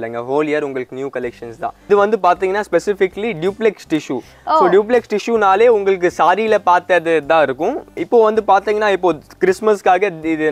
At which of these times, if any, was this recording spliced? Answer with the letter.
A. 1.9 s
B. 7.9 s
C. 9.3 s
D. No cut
A